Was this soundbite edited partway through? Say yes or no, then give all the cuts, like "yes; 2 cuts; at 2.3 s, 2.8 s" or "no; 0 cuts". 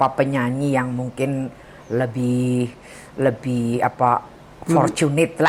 no; 0 cuts